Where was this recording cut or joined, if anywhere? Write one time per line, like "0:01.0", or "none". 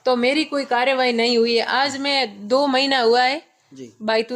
none